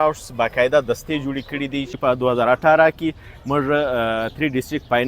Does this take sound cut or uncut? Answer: cut